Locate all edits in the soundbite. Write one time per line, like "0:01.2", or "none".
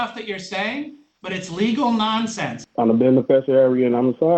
0:02.6